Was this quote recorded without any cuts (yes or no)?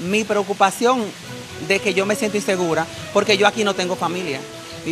yes